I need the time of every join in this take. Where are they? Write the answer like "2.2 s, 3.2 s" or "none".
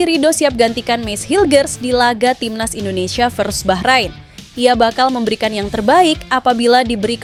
none